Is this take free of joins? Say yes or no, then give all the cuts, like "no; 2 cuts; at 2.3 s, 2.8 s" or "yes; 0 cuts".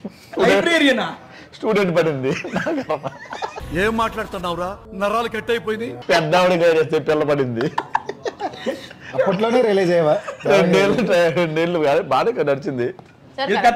yes; 0 cuts